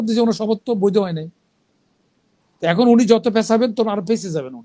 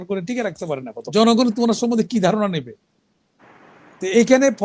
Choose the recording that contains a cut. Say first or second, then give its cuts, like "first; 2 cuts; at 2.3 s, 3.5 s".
second; 1 cut; at 0.9 s